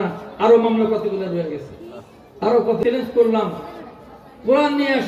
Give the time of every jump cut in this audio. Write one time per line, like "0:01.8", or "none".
0:02.8